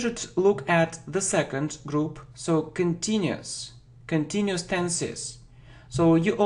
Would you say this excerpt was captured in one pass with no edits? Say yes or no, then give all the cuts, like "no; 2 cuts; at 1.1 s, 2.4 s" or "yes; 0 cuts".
yes; 0 cuts